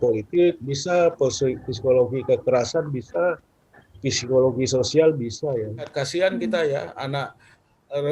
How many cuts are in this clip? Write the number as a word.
one